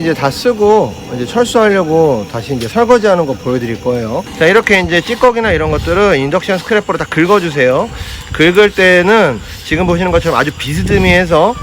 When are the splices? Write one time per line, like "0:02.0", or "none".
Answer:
0:04.2